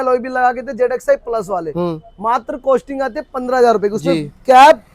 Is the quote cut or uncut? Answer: uncut